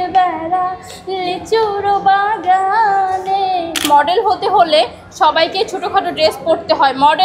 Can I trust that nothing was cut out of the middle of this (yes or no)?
no